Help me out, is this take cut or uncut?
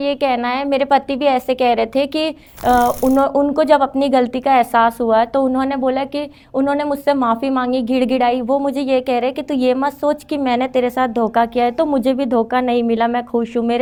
uncut